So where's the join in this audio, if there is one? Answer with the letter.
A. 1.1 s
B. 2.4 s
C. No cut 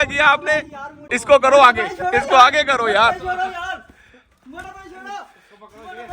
A